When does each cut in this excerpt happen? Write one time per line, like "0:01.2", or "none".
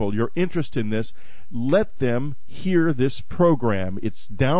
0:03.1